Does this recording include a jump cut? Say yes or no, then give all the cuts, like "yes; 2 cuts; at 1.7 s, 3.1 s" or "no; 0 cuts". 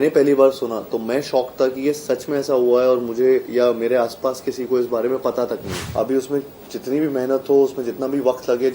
yes; 1 cut; at 5.8 s